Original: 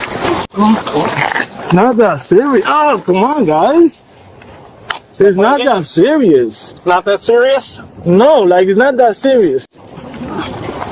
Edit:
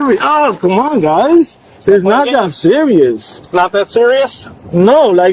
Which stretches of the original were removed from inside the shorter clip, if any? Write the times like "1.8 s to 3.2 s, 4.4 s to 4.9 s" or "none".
4.1 s to 5.0 s